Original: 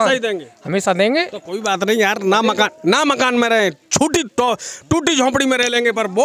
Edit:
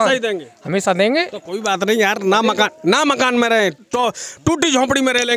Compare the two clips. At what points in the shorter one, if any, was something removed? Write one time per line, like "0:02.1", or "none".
0:03.8